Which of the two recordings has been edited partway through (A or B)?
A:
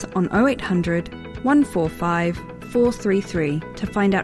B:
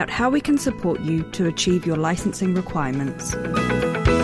B